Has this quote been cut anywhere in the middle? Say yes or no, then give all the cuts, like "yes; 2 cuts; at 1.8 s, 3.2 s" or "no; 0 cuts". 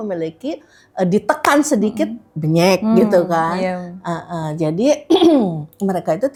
no; 0 cuts